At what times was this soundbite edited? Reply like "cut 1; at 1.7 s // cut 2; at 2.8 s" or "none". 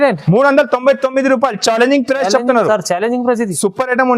none